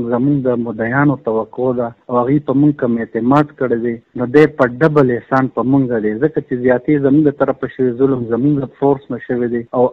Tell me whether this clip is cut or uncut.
uncut